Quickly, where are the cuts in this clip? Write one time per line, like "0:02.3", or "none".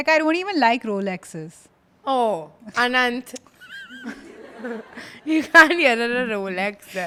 none